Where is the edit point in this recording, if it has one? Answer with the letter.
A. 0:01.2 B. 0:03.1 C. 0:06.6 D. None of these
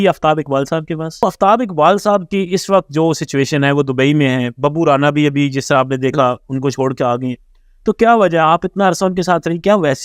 A